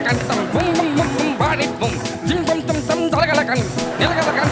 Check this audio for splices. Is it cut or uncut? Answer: uncut